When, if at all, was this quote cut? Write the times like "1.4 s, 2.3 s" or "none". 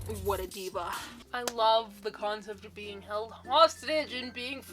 1.2 s